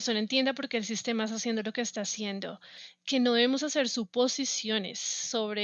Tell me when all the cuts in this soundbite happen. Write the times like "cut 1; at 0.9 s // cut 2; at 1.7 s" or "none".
cut 1; at 2.7 s

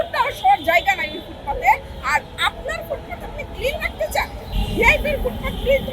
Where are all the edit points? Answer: cut 1; at 4.5 s

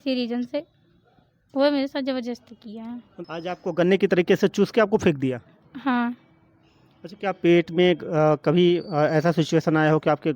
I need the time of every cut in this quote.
cut 1; at 3.1 s

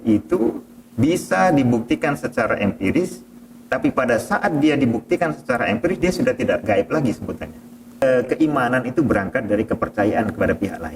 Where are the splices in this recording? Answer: cut 1; at 8.0 s

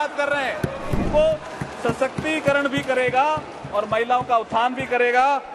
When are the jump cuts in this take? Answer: cut 1; at 1.1 s

